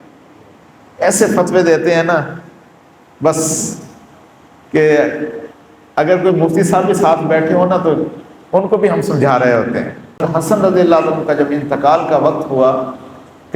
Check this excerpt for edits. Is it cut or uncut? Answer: cut